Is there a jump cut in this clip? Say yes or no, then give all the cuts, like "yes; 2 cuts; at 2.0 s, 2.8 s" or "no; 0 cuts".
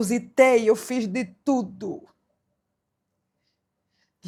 no; 0 cuts